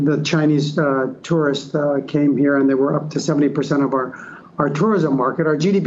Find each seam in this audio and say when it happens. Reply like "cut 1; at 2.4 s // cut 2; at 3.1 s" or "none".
none